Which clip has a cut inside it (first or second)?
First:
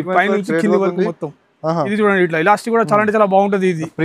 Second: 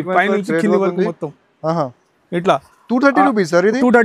first